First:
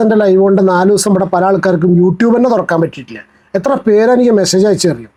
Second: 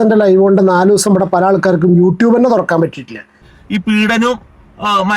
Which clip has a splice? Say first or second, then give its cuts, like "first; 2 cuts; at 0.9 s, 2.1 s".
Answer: second; 1 cut; at 3.4 s